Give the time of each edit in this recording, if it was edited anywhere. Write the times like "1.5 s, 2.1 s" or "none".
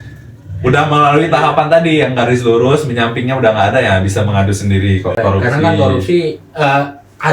5.2 s